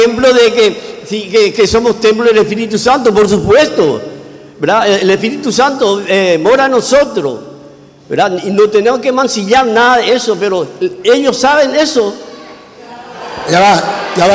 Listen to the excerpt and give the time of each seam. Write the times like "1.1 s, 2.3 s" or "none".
none